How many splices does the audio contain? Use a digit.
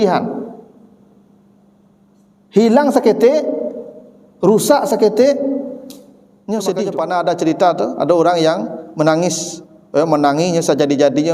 1